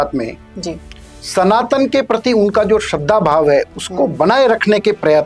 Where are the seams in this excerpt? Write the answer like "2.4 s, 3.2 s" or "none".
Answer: none